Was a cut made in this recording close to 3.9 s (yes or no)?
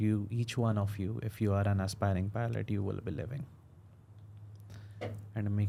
no